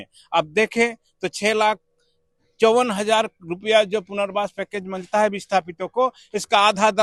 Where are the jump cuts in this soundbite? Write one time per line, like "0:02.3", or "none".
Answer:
none

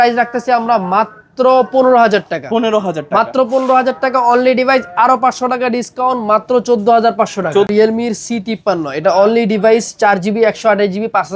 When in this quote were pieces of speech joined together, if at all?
0:07.7

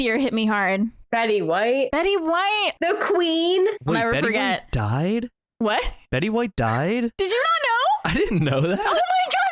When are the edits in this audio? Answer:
0:01.0
0:01.9
0:02.7
0:03.8

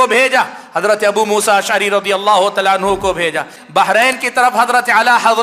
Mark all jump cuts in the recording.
0:03.5

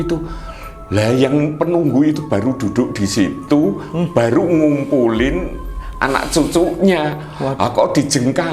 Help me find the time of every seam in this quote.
none

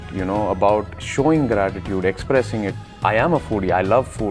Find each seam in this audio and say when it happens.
0:02.8

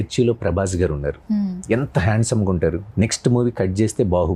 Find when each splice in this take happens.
0:02.8

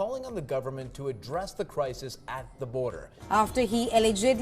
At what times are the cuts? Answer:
0:03.1

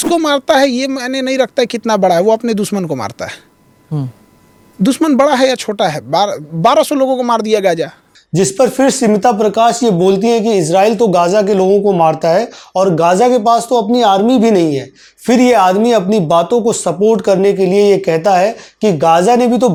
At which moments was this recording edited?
none

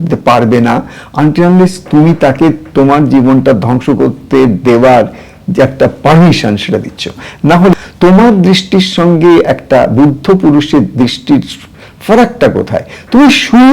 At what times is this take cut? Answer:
0:07.7

